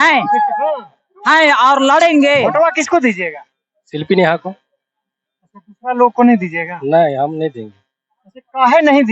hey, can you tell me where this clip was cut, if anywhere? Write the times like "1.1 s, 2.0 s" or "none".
2.5 s